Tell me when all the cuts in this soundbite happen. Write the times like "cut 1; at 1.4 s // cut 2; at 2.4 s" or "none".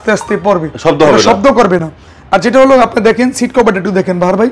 none